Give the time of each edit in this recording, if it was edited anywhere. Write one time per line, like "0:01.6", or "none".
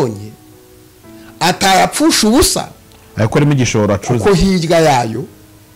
none